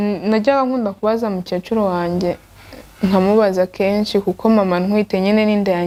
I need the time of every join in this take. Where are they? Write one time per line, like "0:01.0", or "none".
none